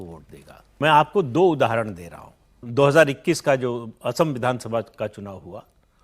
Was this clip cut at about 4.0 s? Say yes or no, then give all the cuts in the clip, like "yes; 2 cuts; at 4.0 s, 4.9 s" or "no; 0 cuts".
no; 2 cuts; at 0.8 s, 2.6 s